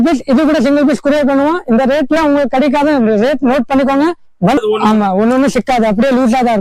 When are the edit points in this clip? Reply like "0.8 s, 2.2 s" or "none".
4.6 s